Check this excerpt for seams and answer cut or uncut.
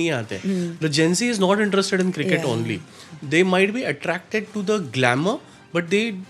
uncut